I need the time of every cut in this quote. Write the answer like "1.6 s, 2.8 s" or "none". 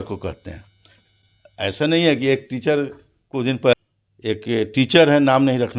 3.7 s